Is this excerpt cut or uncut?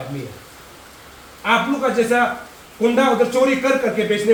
uncut